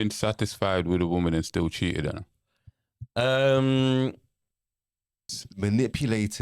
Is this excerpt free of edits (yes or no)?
no